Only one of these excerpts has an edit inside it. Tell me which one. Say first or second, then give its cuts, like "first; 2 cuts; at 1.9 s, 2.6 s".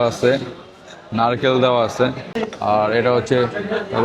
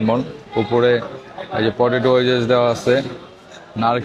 first; 1 cut; at 2.4 s